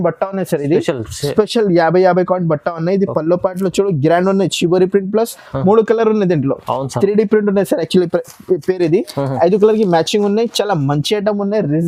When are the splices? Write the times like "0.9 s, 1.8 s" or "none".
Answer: none